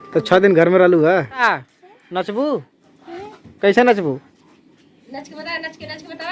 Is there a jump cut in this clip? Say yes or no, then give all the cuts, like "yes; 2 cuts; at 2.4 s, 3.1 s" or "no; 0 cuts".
yes; 1 cut; at 1.4 s